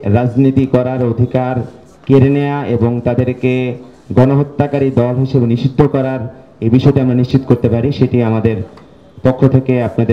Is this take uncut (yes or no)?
yes